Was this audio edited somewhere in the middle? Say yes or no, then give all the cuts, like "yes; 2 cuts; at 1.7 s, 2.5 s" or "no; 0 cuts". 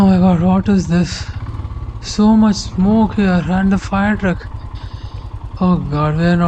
no; 0 cuts